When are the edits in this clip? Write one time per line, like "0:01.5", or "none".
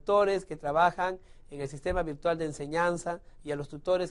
none